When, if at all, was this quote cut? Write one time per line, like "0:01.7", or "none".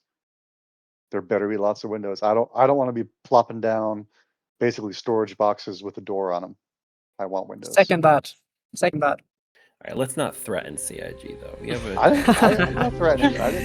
0:10.0